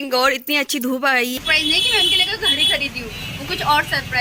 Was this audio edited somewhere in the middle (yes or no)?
yes